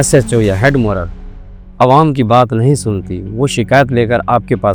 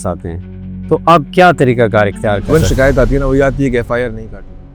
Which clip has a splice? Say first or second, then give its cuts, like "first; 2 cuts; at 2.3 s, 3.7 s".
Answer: second; 1 cut; at 2.5 s